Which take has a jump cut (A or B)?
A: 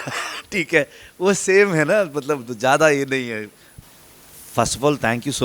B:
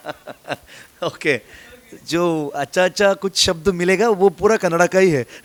A